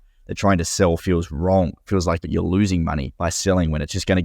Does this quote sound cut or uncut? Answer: cut